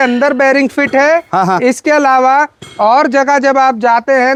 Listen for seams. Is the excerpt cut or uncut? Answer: uncut